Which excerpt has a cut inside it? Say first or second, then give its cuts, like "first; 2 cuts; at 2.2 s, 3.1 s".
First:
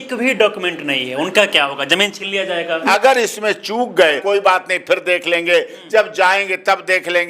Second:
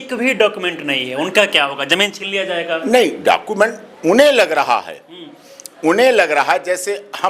first; 2 cuts; at 2.8 s, 4.2 s